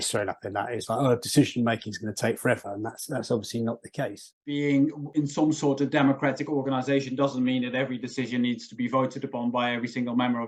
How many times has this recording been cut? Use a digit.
1